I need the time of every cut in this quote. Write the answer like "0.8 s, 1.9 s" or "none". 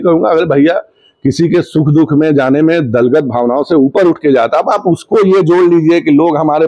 none

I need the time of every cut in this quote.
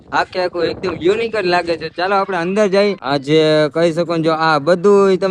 3.0 s

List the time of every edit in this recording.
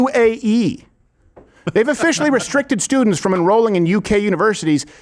none

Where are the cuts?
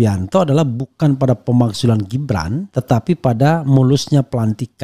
none

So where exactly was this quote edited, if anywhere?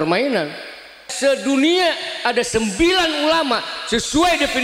1.1 s

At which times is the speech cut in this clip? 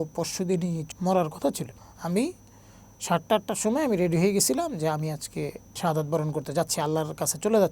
0.8 s, 1.7 s, 5.7 s

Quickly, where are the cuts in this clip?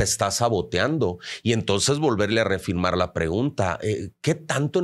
none

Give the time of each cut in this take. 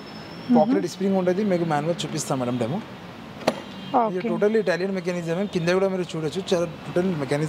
none

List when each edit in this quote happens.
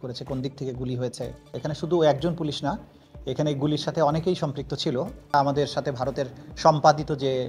1.4 s, 5.2 s

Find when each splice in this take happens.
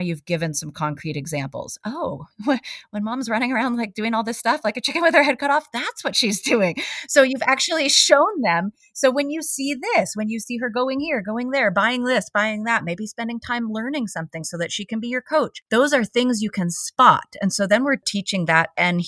15.6 s, 18.0 s

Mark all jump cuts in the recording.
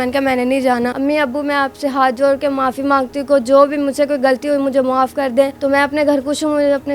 0.9 s, 5.5 s

